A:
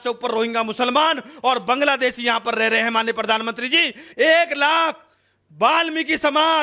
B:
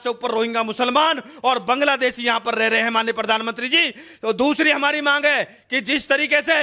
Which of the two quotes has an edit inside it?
A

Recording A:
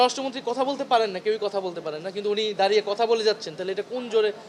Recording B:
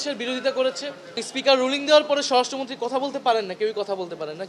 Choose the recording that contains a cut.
B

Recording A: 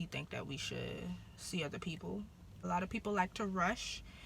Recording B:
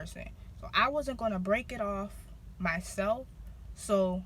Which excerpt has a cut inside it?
A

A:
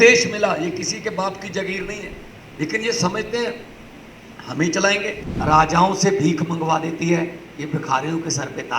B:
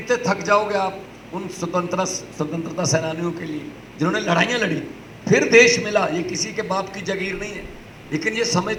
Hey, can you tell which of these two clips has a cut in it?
A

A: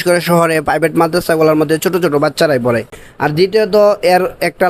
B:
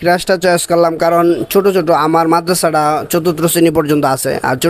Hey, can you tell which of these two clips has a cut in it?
A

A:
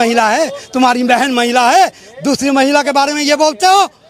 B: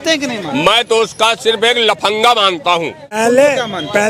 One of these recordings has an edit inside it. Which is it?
B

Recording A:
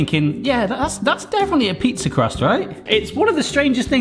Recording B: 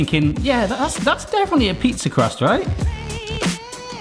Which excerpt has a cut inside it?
A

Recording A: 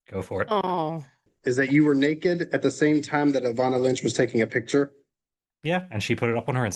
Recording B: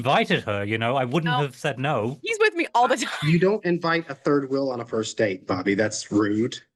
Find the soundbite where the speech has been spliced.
A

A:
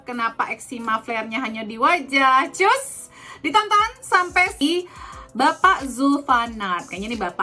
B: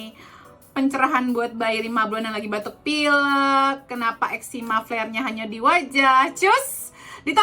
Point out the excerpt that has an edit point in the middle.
A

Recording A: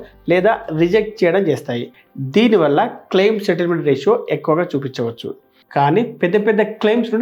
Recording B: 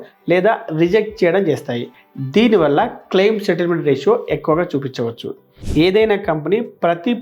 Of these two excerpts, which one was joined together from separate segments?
B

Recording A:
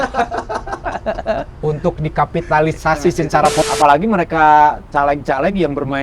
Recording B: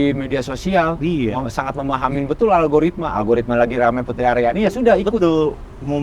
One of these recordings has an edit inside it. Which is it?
A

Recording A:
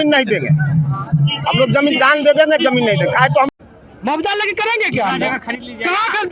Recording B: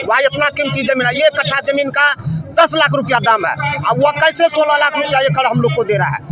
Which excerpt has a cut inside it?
A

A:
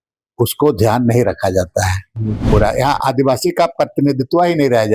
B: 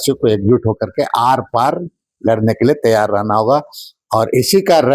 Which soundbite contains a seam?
A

